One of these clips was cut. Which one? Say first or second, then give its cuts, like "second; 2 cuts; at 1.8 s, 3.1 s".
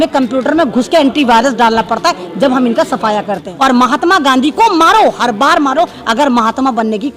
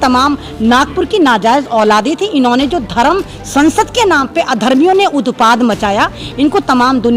first; 1 cut; at 3.5 s